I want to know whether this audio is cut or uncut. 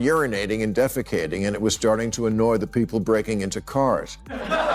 uncut